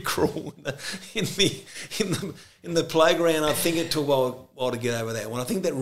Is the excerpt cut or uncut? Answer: uncut